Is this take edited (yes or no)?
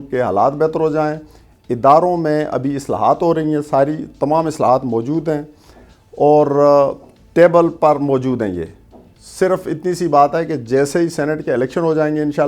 no